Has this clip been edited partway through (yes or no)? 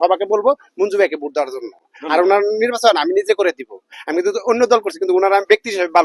no